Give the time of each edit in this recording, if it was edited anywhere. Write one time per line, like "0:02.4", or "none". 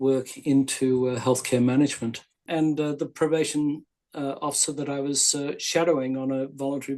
0:02.4